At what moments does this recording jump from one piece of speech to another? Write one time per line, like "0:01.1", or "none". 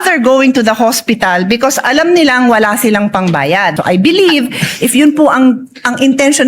0:03.8